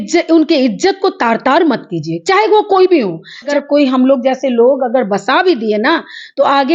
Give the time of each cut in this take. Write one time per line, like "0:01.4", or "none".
0:03.5